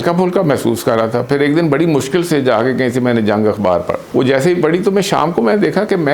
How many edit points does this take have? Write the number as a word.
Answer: one